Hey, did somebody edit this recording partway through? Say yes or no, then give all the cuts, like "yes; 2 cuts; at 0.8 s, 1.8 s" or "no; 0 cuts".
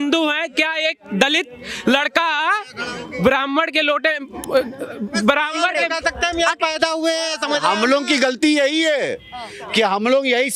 no; 0 cuts